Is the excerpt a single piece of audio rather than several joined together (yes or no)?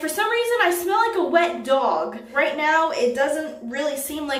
no